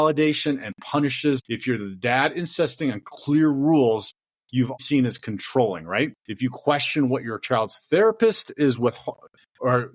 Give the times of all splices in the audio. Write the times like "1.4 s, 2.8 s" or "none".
1.5 s, 4.8 s, 6.2 s